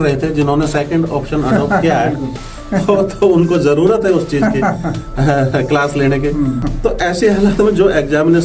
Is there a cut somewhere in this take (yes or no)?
yes